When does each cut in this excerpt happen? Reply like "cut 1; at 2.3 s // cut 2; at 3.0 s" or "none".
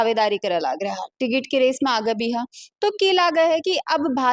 none